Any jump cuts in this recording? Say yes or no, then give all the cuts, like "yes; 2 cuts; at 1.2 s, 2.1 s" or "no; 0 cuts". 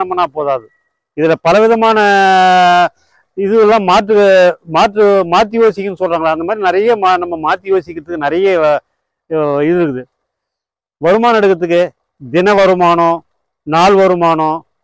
no; 0 cuts